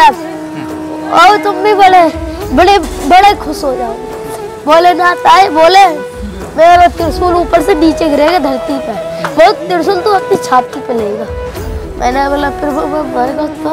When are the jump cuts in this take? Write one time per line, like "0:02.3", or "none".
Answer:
none